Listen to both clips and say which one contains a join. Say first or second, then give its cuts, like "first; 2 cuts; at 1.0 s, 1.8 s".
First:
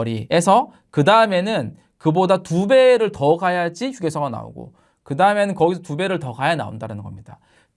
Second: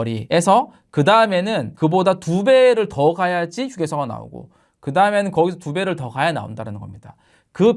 second; 1 cut; at 1.6 s